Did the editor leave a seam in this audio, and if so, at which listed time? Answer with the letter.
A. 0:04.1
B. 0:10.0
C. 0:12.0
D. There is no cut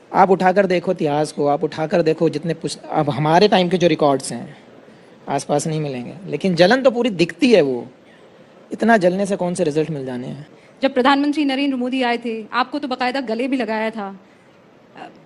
D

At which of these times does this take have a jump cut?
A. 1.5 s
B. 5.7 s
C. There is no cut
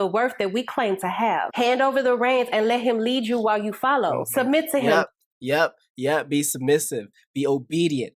A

